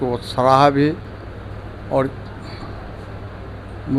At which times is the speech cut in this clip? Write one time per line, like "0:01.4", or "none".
none